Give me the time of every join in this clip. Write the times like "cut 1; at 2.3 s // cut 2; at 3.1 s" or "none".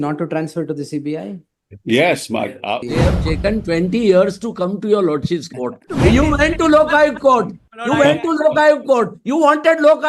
cut 1; at 2.9 s // cut 2; at 5.8 s